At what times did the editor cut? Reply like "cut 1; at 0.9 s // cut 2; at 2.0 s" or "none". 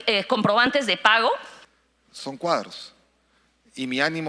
cut 1; at 1.5 s